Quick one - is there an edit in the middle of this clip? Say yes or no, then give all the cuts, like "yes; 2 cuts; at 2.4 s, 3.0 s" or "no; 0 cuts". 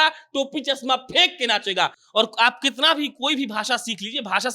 yes; 1 cut; at 2.0 s